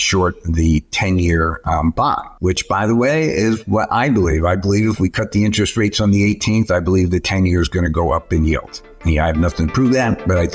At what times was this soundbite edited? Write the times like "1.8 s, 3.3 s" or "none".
9.0 s